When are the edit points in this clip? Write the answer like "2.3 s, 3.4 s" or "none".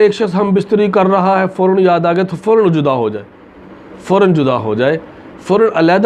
none